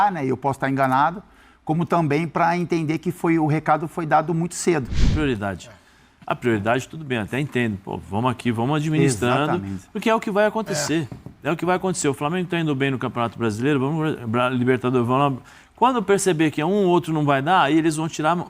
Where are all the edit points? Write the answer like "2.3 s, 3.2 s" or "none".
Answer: 5.1 s